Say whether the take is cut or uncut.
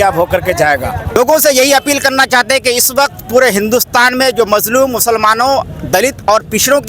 cut